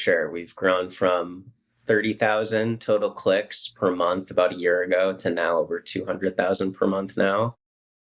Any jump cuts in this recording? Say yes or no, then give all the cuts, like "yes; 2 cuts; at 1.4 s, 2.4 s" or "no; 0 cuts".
no; 0 cuts